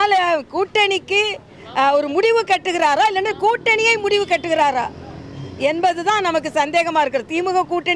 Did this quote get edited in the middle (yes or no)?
no